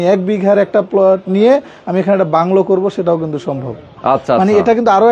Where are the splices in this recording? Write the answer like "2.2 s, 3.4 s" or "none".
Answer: none